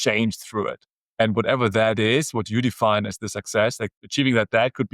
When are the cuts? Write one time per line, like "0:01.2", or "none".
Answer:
0:03.9